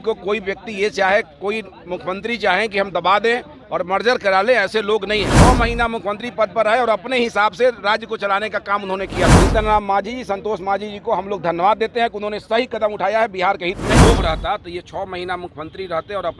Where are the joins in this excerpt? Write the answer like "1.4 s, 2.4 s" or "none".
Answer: 5.3 s, 9.3 s, 14.0 s

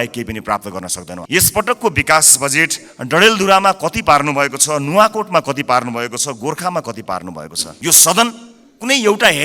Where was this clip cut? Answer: 1.1 s, 7.6 s

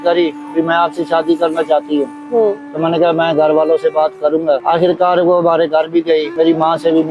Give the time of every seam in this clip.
none

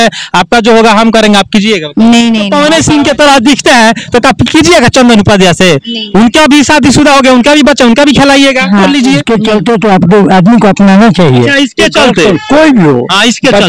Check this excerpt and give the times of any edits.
2.5 s, 9.2 s

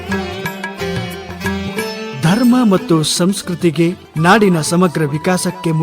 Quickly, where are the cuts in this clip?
4.1 s

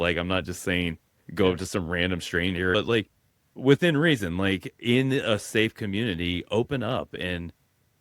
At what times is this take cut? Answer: 2.7 s

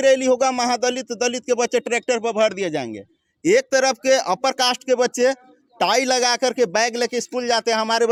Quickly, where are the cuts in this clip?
none

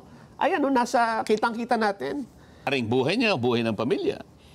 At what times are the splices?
2.7 s

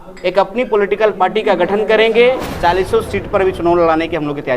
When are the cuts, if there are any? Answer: 2.5 s

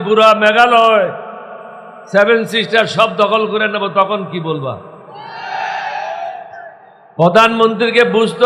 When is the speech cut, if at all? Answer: 6.6 s

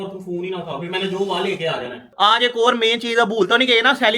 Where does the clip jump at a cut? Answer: 2.1 s

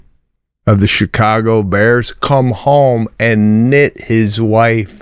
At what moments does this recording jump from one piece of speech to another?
none

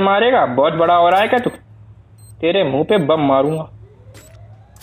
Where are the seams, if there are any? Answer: 3.8 s

